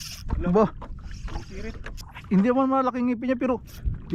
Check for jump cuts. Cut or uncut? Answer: cut